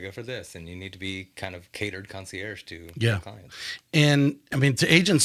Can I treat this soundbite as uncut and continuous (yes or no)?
yes